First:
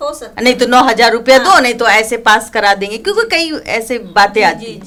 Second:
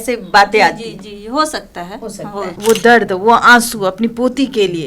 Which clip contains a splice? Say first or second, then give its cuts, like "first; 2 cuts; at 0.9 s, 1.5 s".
second; 1 cut; at 2.5 s